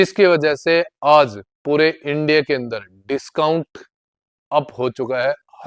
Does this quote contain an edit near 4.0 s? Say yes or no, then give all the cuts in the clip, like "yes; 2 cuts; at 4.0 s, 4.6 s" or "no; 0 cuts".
no; 0 cuts